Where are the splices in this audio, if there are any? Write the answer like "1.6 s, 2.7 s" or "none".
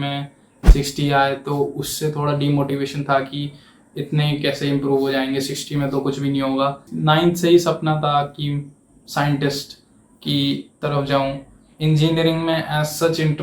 6.9 s

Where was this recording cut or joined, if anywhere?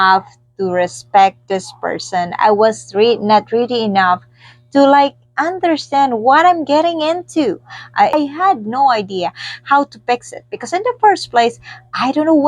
8.1 s

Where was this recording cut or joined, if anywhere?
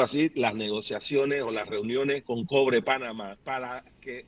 2.2 s, 3.6 s

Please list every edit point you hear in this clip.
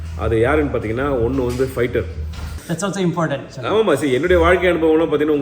2.6 s

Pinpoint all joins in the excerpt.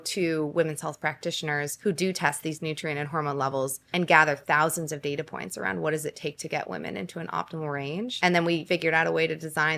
1.7 s, 3.8 s, 8.1 s, 8.6 s

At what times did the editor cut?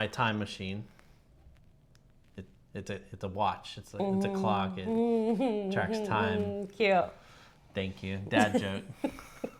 none

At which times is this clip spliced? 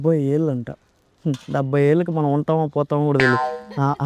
none

